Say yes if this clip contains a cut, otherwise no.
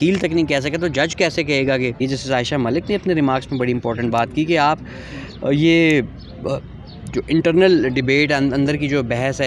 yes